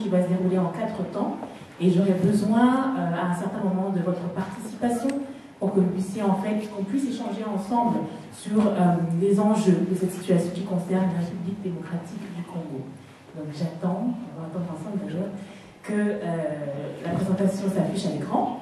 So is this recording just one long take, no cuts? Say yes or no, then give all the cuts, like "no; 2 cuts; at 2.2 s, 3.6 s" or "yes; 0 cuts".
yes; 0 cuts